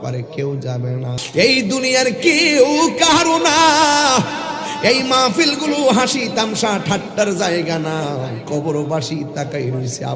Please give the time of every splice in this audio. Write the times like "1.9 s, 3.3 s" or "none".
1.2 s